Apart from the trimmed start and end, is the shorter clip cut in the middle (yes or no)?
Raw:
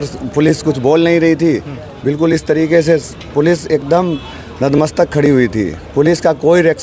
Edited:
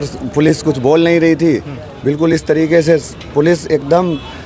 no